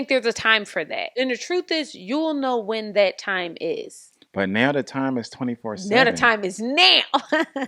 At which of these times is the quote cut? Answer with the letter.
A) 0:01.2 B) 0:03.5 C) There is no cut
A